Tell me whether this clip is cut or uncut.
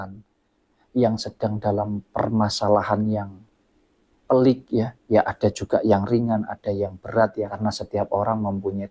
cut